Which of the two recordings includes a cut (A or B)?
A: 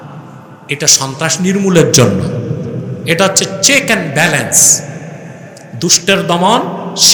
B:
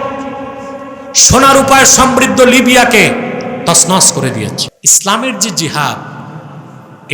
B